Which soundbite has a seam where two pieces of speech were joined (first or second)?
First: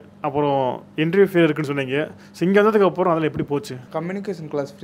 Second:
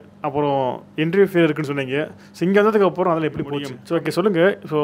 second